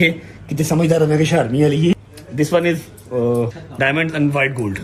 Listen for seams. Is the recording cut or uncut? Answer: cut